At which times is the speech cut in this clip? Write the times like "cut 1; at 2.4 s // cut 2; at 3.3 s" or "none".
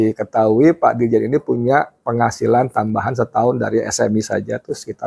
none

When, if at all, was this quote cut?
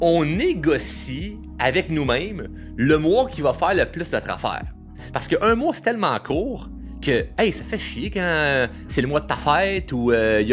none

